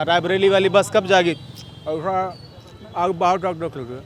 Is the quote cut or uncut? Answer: uncut